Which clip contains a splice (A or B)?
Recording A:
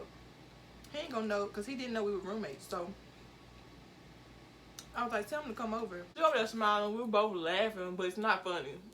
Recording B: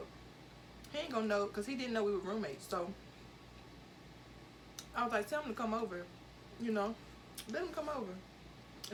A